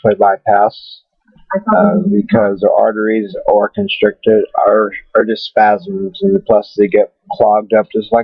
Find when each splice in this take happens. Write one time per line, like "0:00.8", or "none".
0:06.9